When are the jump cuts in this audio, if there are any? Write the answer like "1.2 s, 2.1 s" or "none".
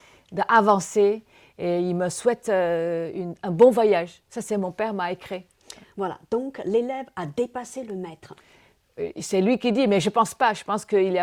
none